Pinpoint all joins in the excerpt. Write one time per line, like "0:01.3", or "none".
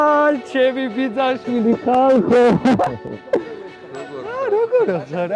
none